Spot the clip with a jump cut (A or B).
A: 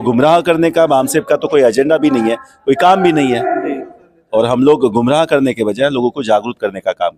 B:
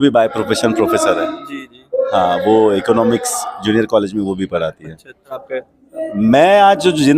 B